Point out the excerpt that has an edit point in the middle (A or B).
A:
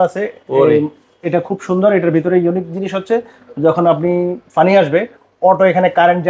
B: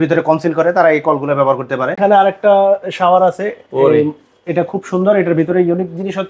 B